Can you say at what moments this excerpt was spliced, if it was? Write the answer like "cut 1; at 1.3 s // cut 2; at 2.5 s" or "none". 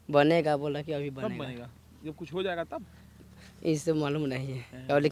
none